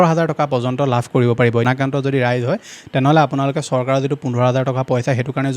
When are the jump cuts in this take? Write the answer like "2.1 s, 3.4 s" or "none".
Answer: 1.6 s